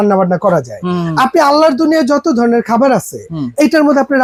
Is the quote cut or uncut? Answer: uncut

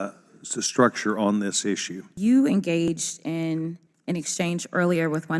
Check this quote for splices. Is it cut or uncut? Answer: cut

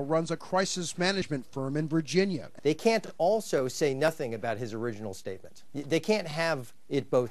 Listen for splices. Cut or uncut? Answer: cut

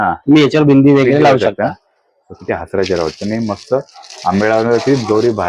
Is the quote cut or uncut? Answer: uncut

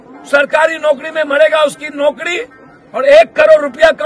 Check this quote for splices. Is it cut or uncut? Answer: uncut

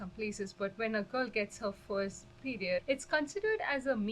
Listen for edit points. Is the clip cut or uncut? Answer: cut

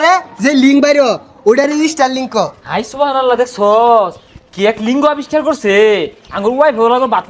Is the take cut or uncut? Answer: uncut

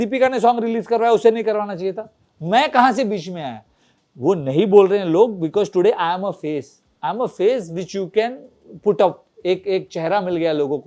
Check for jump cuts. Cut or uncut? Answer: uncut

